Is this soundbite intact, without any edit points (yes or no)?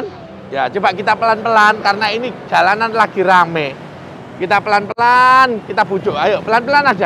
yes